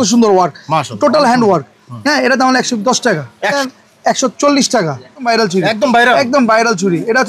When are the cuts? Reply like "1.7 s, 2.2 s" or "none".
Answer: 3.6 s, 5.2 s